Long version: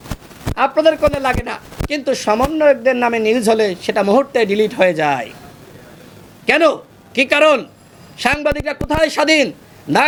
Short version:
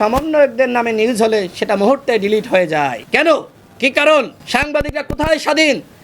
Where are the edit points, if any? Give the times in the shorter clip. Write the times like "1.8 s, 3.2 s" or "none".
3.0 s, 4.4 s